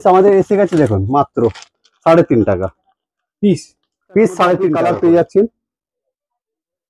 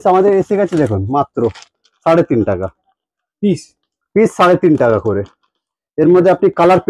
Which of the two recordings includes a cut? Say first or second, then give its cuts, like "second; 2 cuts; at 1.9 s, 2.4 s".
first; 1 cut; at 4.7 s